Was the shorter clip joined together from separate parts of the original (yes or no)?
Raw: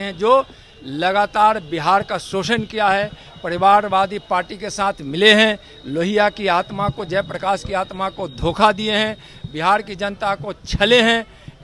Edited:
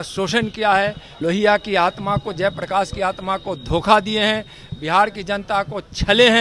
yes